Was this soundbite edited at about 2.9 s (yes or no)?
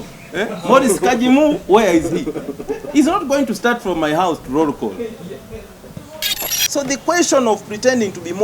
no